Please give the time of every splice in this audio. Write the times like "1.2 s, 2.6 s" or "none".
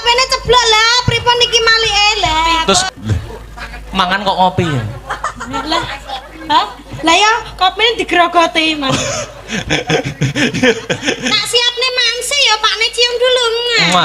2.8 s

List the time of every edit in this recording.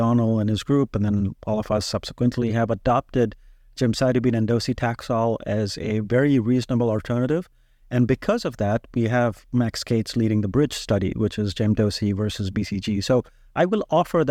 none

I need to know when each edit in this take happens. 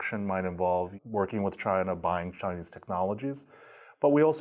none

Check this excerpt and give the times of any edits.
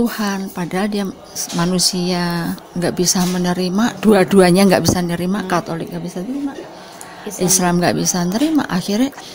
2.6 s

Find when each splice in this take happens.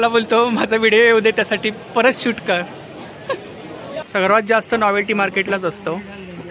4.0 s

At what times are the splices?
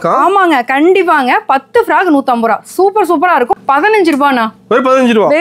3.5 s

